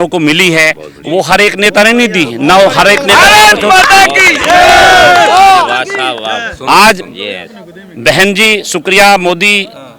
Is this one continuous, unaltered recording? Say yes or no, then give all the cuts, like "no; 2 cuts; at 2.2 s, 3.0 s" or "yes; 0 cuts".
yes; 0 cuts